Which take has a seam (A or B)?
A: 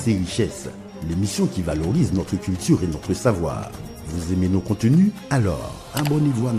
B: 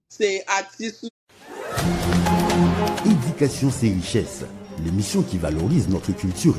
B